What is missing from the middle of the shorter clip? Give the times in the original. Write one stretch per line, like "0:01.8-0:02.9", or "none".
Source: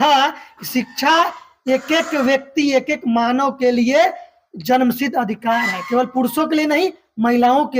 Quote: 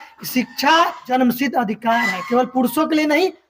0:01.4-0:04.6

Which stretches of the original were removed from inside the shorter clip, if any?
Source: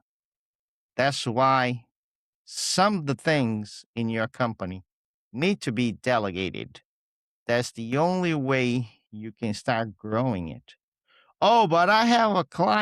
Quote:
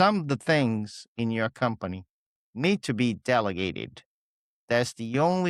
none

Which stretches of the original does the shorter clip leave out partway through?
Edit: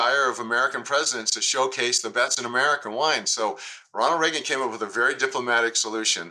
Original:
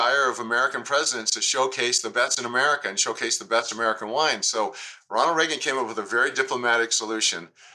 0:02.8-0:04.0

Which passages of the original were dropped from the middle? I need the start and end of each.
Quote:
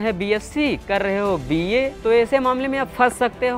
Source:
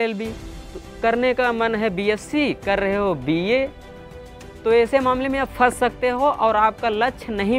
0:03.7-0:04.6

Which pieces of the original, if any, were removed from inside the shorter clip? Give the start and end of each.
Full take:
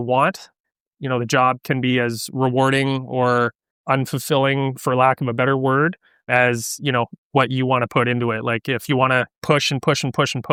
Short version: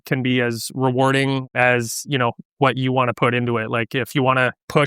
0:03.0-0:06.2

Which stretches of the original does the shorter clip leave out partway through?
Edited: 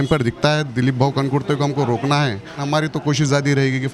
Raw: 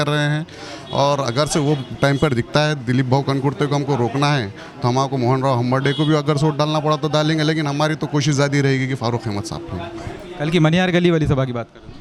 0:04.7-0:07.7

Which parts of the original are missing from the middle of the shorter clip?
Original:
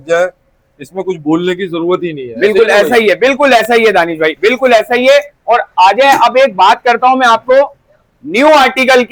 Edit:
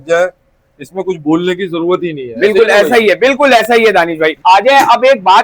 0:04.4-0:05.7

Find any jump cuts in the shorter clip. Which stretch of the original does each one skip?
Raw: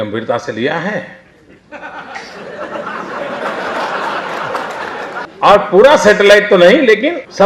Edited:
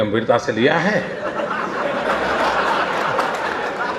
0:01.1-0:02.5

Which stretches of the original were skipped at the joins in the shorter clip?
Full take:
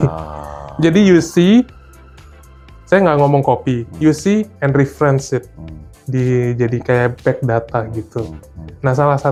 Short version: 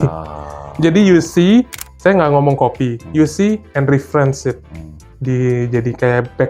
0:01.8-0:02.7

